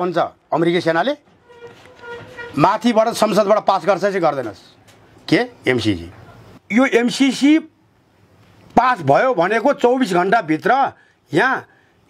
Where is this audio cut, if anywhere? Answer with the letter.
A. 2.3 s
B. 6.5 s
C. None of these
B